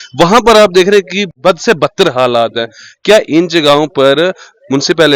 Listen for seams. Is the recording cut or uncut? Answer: cut